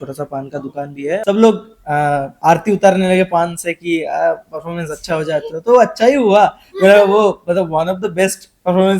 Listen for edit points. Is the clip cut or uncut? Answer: cut